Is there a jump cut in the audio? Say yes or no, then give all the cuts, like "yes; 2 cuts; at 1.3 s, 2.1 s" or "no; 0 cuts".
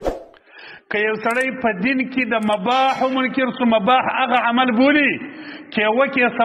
no; 0 cuts